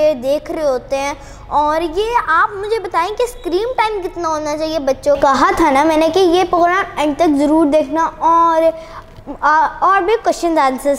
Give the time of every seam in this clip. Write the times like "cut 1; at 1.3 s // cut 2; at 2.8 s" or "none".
cut 1; at 5.2 s